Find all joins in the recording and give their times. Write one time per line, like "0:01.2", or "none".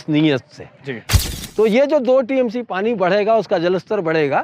0:01.0